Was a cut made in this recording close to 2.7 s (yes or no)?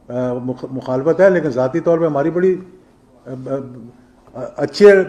no